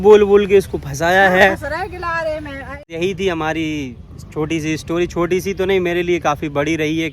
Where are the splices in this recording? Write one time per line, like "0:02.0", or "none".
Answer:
0:03.0